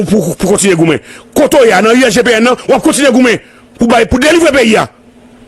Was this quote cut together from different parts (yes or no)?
no